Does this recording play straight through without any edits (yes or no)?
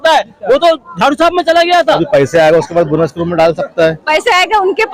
no